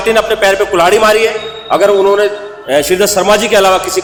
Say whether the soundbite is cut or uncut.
uncut